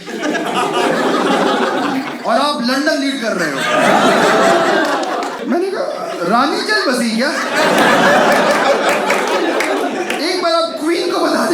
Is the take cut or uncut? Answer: cut